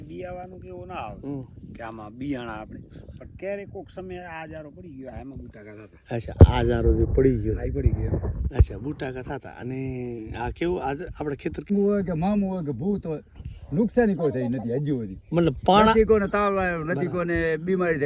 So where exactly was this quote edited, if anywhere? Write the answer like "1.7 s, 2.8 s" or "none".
11.7 s